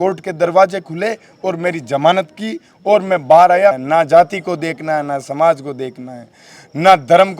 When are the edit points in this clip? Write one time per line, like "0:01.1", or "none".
0:03.8